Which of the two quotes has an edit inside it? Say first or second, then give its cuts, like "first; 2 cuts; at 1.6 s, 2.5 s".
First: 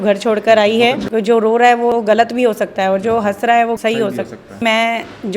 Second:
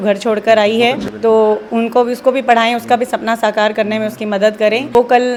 first; 2 cuts; at 1.0 s, 4.6 s